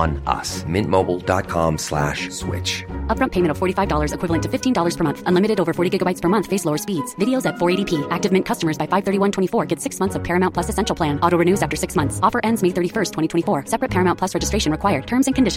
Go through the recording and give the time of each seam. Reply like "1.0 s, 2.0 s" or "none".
none